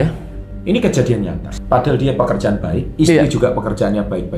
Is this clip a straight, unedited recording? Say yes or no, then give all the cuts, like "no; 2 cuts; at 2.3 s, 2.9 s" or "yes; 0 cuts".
no; 1 cut; at 1.4 s